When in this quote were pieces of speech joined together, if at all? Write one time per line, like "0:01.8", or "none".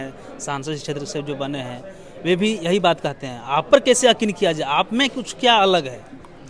none